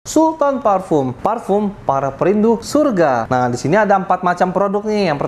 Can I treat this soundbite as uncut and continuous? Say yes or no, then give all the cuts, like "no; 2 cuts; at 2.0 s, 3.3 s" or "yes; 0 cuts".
no; 3 cuts; at 1.1 s, 2.6 s, 3.2 s